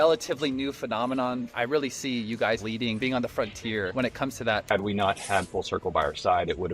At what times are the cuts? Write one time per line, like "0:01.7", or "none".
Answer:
0:02.8
0:04.6

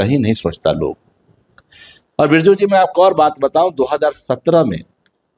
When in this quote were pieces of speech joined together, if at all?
none

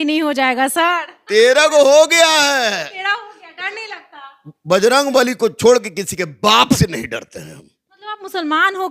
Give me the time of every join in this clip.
none

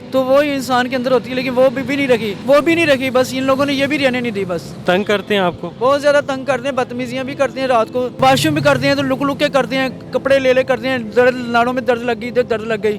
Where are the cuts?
0:02.3
0:04.8
0:08.1

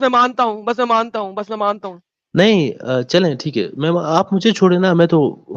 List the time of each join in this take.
none

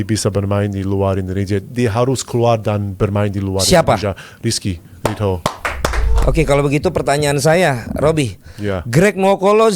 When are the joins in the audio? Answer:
0:06.1

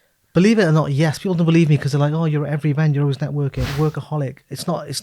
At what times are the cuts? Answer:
0:03.6

